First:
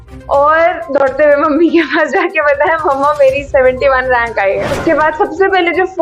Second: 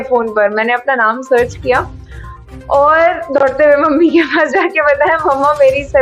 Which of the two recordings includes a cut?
first; 1 cut; at 4.7 s

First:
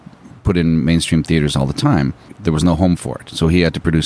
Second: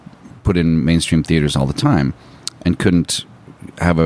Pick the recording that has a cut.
first; 1 cut; at 2.4 s

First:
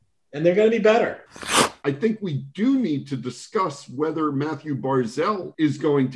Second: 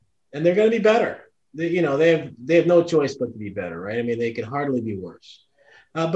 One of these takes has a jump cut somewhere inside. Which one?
first; 1 cut; at 1.5 s

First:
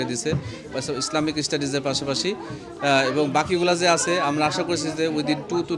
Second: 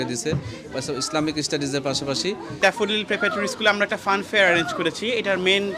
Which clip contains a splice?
second; 1 cut; at 2.6 s

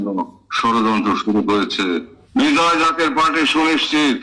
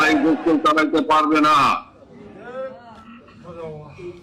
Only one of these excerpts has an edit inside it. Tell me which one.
first; 1 cut; at 2.2 s

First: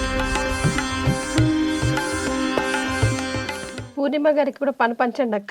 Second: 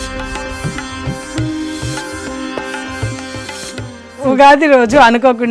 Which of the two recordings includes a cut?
second; 1 cut; at 4.2 s

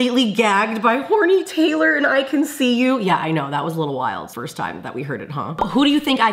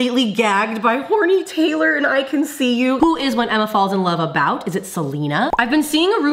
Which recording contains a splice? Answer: second; 2 cuts; at 3.0 s, 5.5 s

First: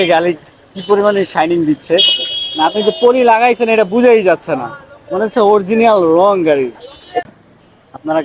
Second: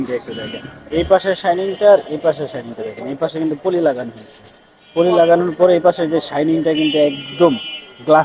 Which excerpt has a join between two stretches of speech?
first; 1 cut; at 7.2 s

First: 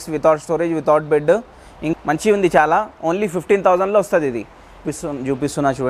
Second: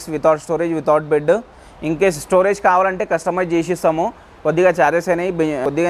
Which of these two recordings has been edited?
first; 2 cuts; at 1.9 s, 4.8 s

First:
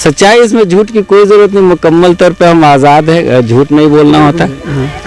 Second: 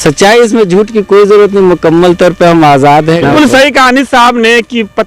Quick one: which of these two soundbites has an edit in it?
second; 1 cut; at 3.3 s

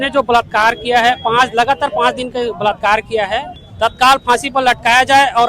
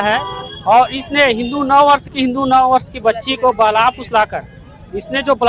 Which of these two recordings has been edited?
first; 1 cut; at 3.6 s

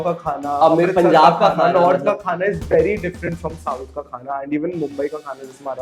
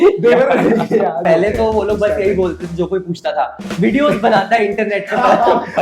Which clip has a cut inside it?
second; 1 cut; at 1.2 s

